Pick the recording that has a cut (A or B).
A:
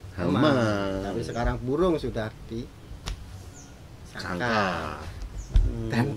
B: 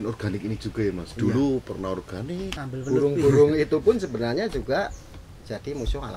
B